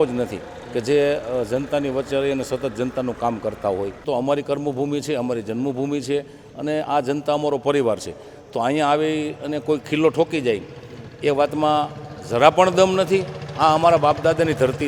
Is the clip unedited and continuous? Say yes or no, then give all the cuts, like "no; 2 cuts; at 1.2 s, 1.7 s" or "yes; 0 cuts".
no; 1 cut; at 4.1 s